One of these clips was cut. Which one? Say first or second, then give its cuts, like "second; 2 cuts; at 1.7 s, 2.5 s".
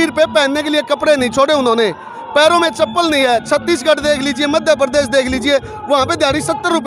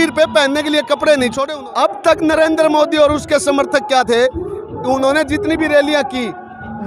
second; 1 cut; at 1.4 s